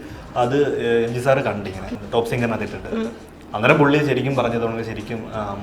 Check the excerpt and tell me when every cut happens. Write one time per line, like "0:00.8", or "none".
0:01.9